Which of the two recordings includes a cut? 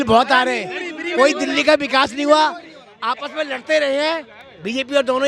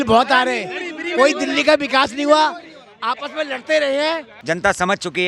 second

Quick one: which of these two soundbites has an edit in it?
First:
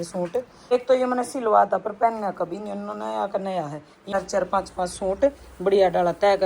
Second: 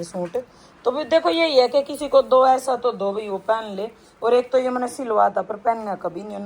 first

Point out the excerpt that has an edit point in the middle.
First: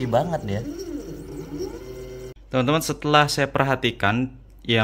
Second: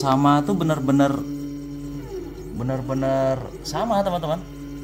first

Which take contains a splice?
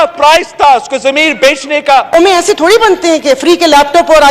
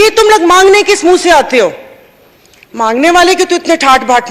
first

